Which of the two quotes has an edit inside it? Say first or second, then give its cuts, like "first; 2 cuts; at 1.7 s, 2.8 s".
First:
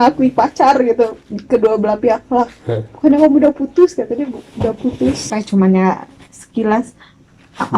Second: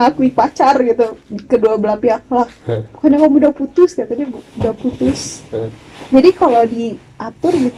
first; 1 cut; at 5.3 s